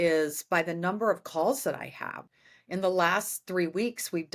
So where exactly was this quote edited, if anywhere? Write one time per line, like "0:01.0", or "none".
0:02.2